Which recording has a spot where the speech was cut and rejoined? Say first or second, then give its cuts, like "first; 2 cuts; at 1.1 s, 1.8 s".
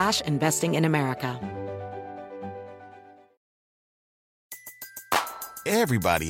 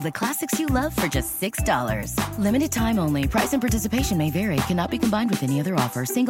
first; 1 cut; at 1.4 s